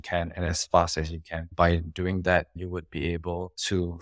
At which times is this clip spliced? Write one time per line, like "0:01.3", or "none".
0:01.5
0:02.5